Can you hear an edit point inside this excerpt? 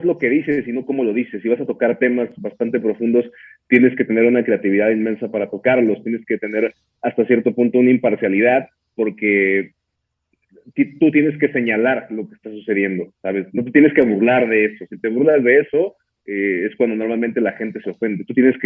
no; 0 cuts

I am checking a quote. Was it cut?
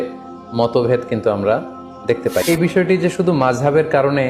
yes; 1 cut; at 2.4 s

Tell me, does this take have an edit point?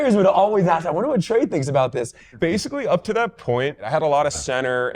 yes; 2 cuts; at 2.3 s, 3.8 s

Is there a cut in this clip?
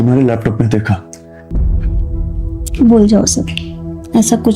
yes; 1 cut; at 1.5 s

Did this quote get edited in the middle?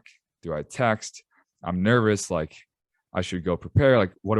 no; 0 cuts

